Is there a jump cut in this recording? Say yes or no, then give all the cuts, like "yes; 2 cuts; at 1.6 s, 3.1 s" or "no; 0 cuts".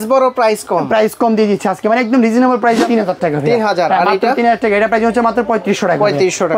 yes; 1 cut; at 2.8 s